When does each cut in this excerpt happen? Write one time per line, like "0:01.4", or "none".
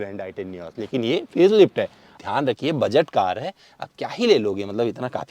0:02.1